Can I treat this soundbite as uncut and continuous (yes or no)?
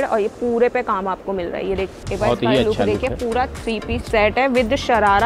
no